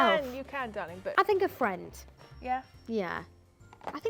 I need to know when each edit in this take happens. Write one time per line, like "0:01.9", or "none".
0:01.1